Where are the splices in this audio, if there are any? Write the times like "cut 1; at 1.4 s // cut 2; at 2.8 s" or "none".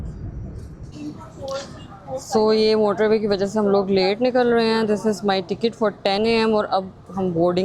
cut 1; at 0.9 s